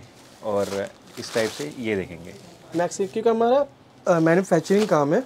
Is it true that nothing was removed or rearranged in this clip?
yes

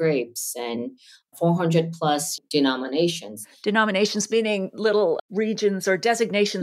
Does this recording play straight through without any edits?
no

